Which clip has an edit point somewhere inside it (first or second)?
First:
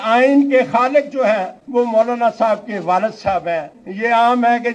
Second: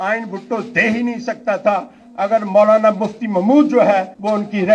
first